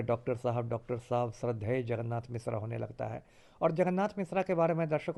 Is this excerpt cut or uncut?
uncut